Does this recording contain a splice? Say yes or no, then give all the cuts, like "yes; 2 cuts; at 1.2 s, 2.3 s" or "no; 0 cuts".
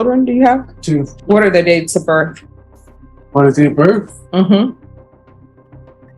yes; 1 cut; at 1.1 s